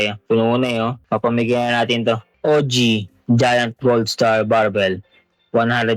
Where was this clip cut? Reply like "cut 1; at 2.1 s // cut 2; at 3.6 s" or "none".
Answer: cut 1; at 2.3 s